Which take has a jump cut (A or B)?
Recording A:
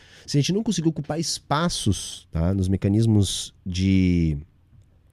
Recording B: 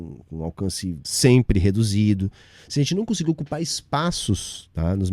B